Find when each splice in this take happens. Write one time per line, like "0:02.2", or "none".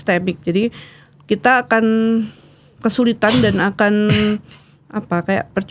none